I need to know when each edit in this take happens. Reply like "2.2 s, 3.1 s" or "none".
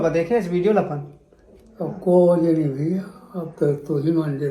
none